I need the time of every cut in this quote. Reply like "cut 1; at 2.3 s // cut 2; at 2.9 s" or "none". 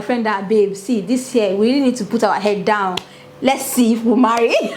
none